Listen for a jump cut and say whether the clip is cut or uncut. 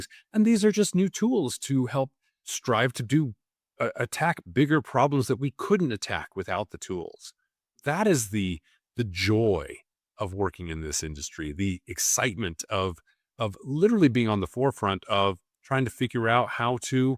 uncut